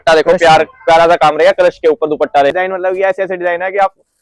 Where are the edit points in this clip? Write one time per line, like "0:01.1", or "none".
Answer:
0:02.5